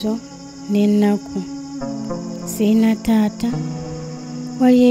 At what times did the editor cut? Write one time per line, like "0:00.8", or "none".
0:01.3
0:02.6